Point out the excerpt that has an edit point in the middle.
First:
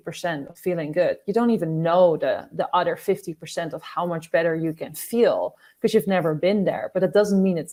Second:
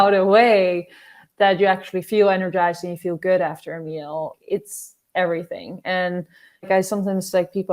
second; 2 cuts; at 4.4 s, 6.7 s

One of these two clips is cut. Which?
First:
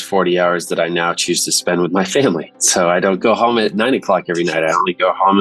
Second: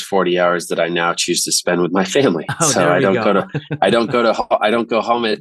first; 1 cut; at 3.2 s

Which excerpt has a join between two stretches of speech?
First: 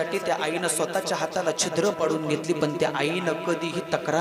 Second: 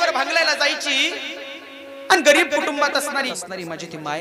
second; 1 cut; at 3.3 s

